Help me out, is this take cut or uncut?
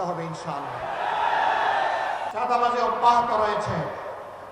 cut